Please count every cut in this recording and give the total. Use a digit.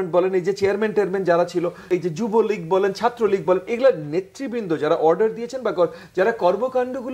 1